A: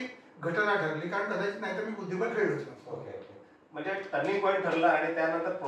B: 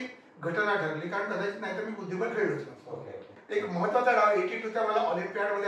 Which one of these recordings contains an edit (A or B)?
B